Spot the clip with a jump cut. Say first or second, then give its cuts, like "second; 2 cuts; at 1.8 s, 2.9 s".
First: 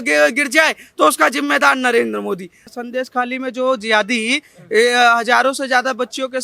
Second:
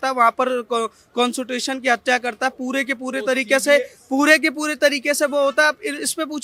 first; 1 cut; at 2.7 s